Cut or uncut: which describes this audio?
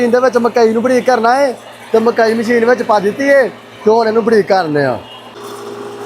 uncut